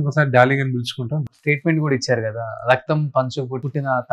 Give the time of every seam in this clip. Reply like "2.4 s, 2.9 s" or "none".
1.2 s